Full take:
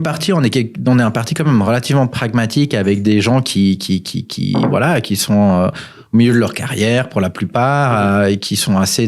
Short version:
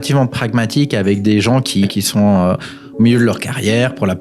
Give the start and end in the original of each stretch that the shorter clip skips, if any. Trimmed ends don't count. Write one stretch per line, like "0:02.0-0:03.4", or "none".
0:03.7-0:05.0

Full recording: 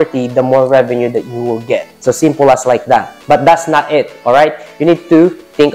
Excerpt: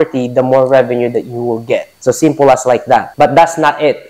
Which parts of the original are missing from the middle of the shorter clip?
0:03.1-0:03.2

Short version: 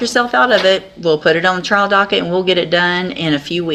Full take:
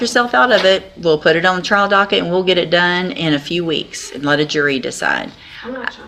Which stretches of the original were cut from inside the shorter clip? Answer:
none

